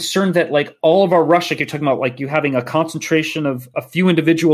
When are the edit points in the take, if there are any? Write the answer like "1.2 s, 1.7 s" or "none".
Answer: none